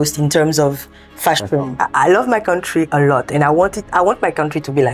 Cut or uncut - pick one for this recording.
cut